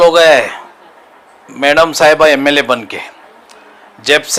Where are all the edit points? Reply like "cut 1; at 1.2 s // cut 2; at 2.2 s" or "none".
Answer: none